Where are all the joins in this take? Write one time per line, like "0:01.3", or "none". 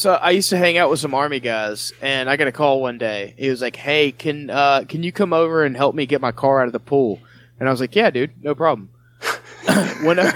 none